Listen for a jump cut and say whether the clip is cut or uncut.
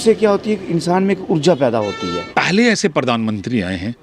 cut